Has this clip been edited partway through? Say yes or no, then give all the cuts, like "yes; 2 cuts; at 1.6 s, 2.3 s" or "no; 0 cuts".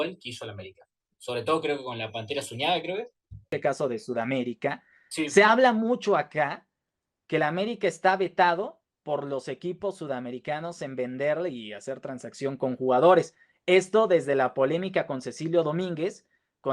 yes; 1 cut; at 3.5 s